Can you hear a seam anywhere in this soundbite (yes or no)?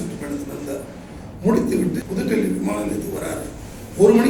yes